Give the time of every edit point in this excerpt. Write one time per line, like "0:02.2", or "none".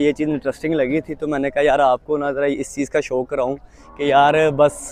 none